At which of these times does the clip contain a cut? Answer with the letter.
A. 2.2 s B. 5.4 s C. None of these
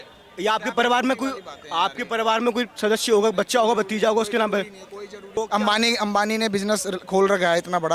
B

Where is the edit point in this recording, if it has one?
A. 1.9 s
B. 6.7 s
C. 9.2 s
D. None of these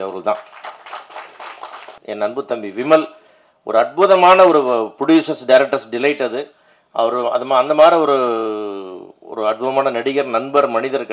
A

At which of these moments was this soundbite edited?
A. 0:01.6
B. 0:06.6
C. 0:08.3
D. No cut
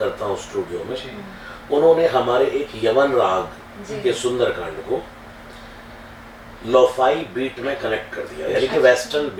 D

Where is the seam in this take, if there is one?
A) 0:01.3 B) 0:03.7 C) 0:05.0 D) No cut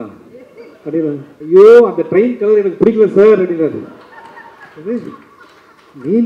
A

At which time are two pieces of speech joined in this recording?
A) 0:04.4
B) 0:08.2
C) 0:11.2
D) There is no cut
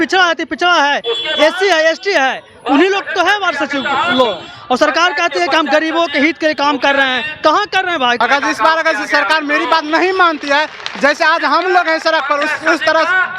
B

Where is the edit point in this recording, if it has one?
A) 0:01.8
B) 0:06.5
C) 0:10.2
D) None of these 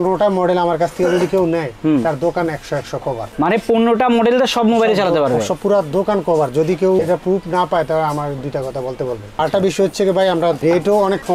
D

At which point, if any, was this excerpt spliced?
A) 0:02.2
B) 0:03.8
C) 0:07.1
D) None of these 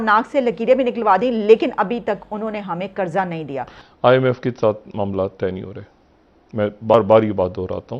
B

